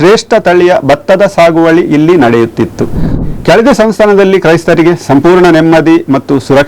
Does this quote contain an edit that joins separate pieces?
yes; 1 cut; at 3.2 s

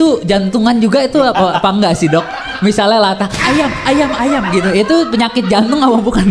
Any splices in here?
no; 0 cuts

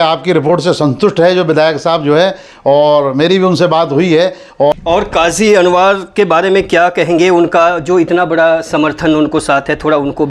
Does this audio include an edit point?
yes; 1 cut; at 4.8 s

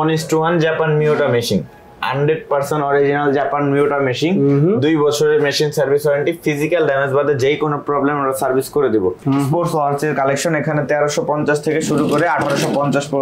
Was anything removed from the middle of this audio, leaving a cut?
yes; 1 cut; at 9.2 s

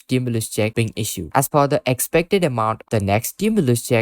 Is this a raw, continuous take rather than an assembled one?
no; 2 cuts; at 1.2 s, 2.8 s

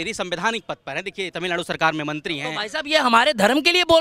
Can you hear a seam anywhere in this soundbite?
no; 0 cuts

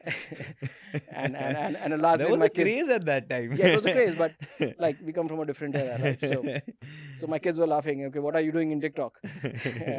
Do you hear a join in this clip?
no; 0 cuts

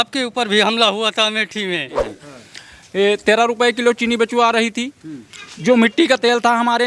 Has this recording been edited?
yes; 1 cut; at 2.2 s

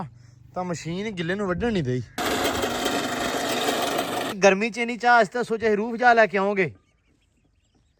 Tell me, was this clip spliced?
yes; 2 cuts; at 2.2 s, 4.4 s

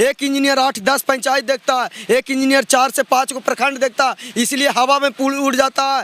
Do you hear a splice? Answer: no; 0 cuts

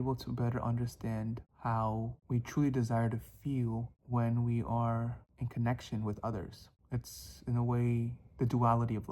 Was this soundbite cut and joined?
yes; 3 cuts; at 1.5 s, 2.2 s, 3.9 s

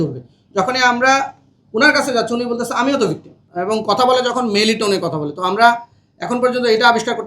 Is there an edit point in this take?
yes; 1 cut; at 3.4 s

